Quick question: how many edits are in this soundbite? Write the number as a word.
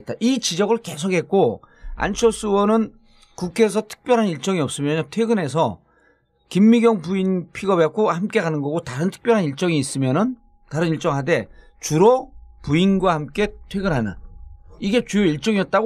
zero